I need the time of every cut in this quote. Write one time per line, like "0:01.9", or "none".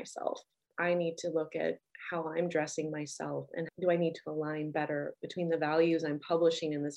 none